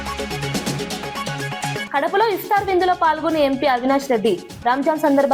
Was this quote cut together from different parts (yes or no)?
no